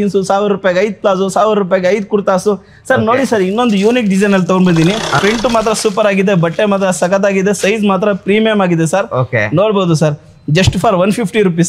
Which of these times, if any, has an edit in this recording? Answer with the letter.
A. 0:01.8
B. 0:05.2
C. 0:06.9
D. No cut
B